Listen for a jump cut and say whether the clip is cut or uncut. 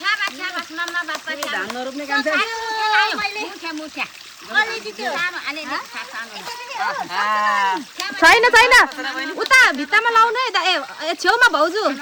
uncut